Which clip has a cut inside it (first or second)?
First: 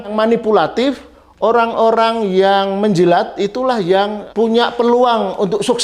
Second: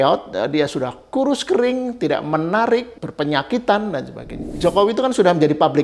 second